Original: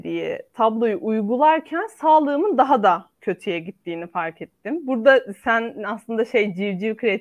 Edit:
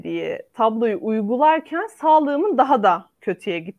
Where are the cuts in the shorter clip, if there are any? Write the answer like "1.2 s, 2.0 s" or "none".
none

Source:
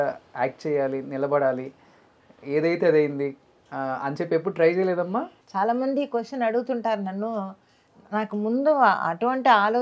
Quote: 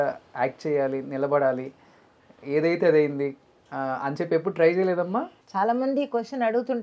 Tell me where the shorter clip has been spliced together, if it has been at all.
none

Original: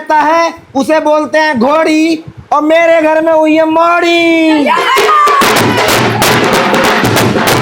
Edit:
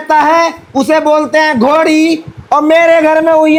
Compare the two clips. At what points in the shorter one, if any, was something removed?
none

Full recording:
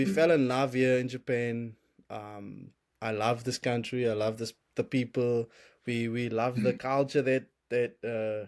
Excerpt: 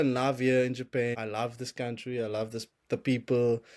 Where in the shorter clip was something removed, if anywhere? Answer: 1.1 s

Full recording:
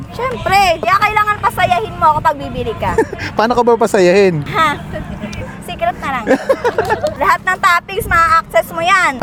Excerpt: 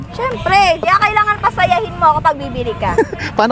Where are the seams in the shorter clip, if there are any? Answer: none

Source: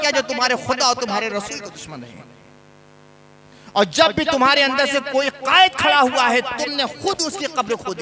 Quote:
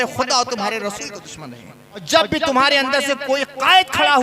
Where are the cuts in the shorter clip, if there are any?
2.1 s

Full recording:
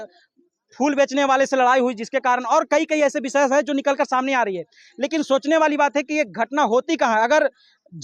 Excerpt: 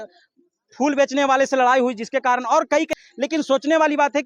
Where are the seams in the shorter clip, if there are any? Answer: 2.9 s

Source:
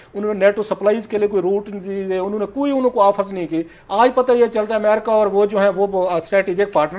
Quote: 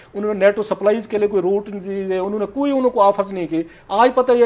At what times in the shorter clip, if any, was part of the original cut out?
none

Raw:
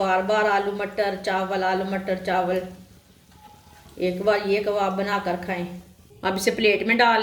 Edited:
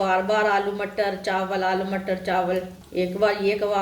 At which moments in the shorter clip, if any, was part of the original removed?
2.8 s

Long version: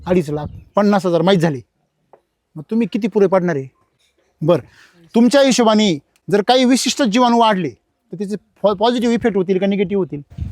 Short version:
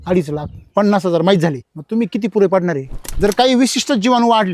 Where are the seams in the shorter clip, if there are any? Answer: 1.7 s, 3.0 s

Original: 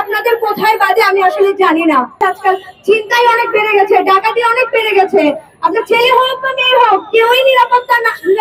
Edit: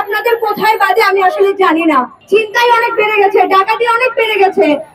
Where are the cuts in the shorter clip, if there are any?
2.1 s

